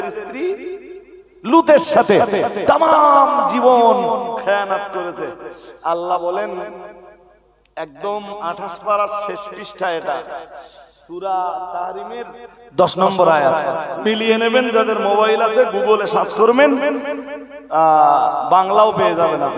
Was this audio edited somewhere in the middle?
no; 0 cuts

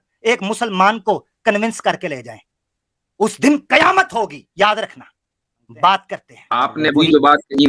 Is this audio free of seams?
no; 1 cut; at 6.5 s

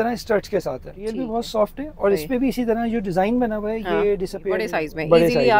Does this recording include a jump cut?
yes; 2 cuts; at 1.2 s, 4.7 s

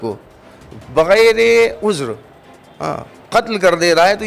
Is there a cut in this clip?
no; 0 cuts

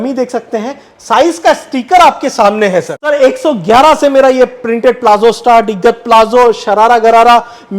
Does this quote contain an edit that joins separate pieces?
yes; 1 cut; at 2.9 s

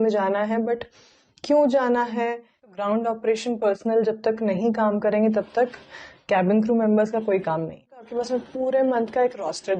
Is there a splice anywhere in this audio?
yes; 2 cuts; at 2.7 s, 8.1 s

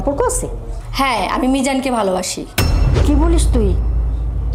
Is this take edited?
no; 0 cuts

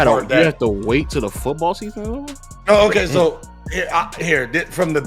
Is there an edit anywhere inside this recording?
no; 0 cuts

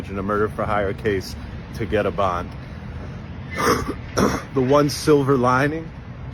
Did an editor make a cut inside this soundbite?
yes; 1 cut; at 1.0 s

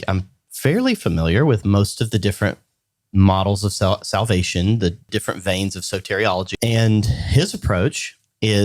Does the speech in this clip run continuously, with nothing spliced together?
no; 2 cuts; at 5.1 s, 6.5 s

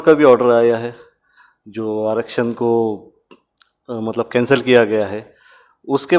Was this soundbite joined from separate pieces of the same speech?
no; 0 cuts

